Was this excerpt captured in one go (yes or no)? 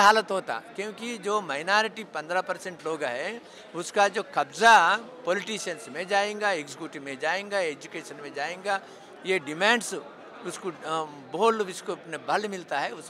yes